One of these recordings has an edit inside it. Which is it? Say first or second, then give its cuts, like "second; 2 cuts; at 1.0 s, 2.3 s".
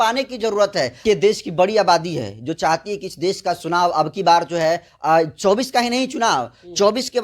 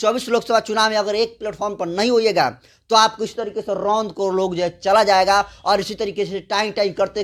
first; 1 cut; at 1.0 s